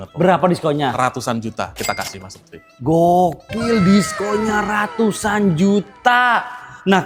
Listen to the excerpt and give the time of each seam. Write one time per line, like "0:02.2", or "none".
none